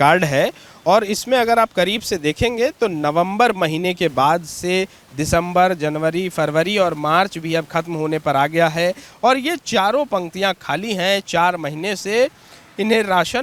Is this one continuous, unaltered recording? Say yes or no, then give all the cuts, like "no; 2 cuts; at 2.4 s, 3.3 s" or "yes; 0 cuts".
yes; 0 cuts